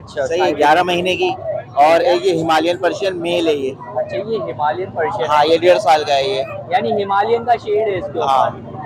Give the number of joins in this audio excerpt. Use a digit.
0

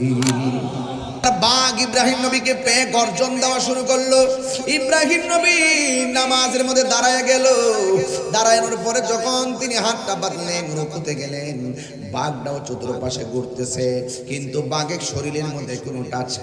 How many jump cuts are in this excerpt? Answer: 1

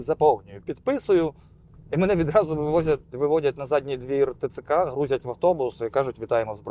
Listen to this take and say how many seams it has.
0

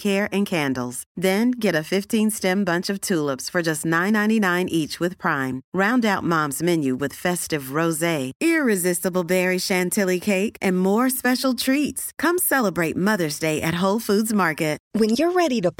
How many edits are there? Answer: 1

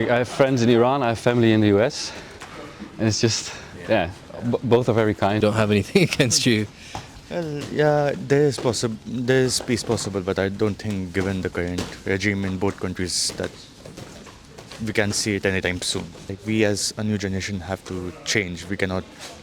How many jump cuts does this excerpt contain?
2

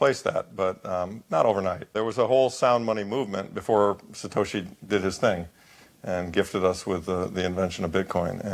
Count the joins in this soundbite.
1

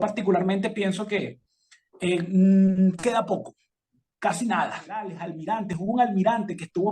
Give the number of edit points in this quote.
1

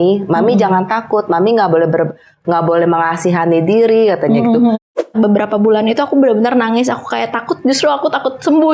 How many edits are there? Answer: 1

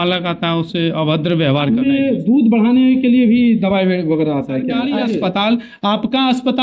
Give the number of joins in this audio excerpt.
2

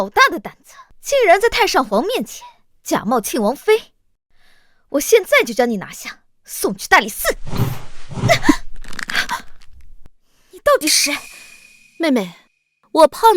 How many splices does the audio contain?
1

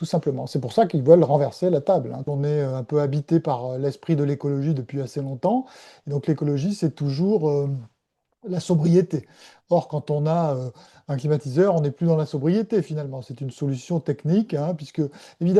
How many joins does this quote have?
1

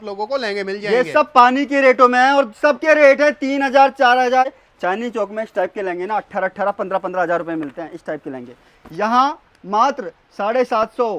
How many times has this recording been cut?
1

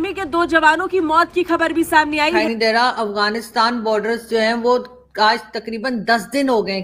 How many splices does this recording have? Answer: 1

